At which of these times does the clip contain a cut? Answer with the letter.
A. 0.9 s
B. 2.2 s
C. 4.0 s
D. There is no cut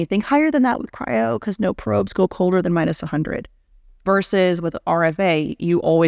C